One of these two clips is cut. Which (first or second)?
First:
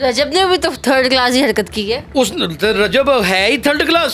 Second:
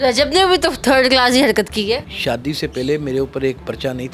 second